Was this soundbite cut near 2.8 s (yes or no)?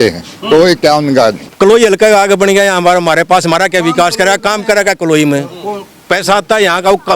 no